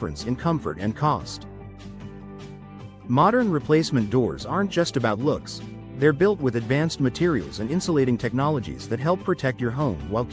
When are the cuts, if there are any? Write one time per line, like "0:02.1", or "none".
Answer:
0:01.2
0:02.7